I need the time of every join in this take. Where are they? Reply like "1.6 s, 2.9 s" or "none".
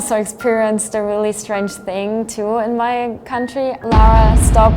3.8 s